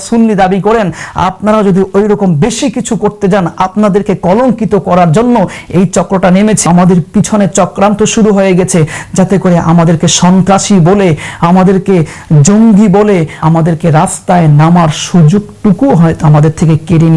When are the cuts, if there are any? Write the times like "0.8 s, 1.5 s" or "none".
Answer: 6.6 s, 13.4 s